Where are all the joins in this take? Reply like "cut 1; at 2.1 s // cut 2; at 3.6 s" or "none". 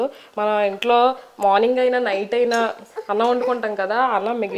none